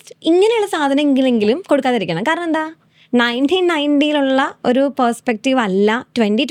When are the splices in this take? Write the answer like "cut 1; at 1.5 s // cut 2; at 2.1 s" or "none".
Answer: none